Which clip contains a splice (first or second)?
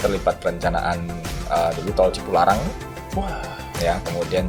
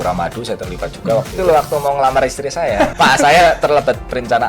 second